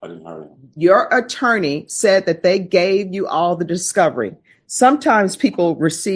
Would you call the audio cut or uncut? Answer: uncut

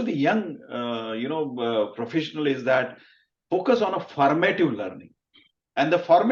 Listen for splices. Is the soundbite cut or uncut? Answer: uncut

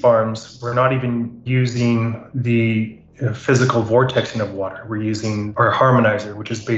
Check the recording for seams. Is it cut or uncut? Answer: cut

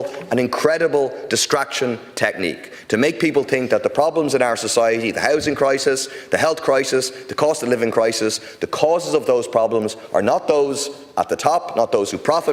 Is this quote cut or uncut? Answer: uncut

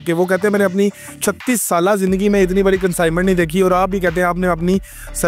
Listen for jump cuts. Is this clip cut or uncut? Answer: uncut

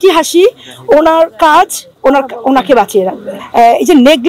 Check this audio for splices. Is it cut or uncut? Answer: cut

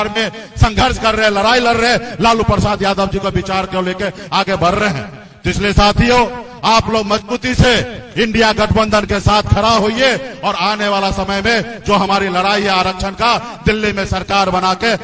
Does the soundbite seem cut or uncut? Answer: uncut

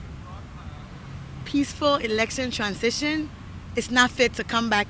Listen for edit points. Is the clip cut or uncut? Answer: uncut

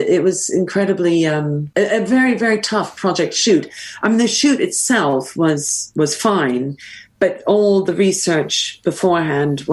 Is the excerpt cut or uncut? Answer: cut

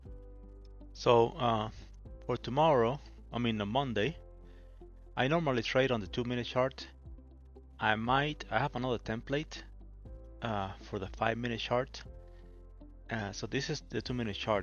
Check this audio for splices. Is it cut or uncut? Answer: cut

